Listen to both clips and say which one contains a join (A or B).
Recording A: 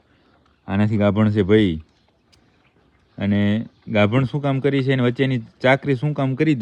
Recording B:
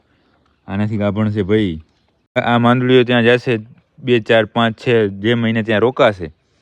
B